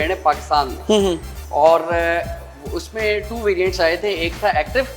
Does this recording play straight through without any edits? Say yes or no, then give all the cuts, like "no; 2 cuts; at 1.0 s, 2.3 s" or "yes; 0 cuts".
yes; 0 cuts